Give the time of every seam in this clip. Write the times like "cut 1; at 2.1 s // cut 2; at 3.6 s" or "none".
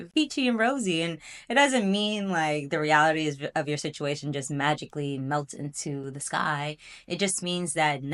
none